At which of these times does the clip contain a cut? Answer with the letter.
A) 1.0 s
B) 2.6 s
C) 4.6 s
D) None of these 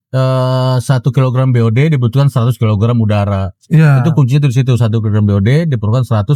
D